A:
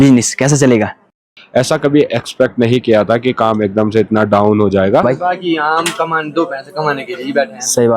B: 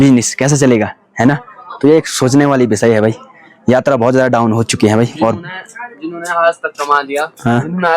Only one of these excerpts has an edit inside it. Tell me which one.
A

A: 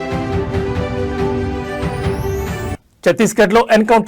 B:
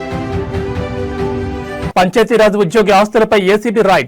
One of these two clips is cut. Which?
B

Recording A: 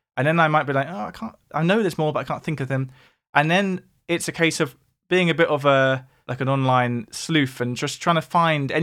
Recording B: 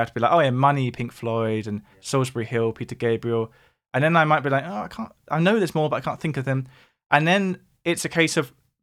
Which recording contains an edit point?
A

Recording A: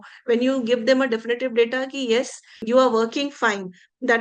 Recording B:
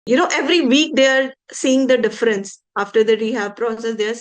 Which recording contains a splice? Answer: A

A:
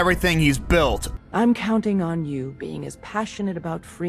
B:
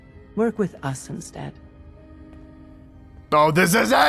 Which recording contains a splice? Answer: A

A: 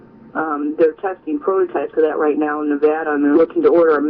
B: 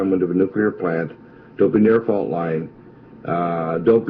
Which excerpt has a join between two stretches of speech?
A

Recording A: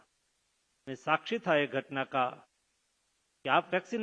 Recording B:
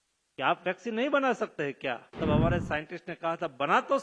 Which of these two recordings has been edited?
B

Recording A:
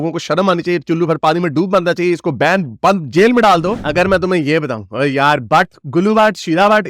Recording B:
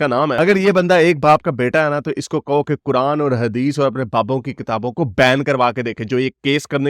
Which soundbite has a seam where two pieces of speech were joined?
A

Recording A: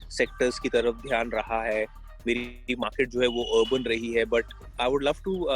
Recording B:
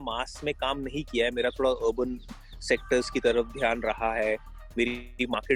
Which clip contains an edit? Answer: A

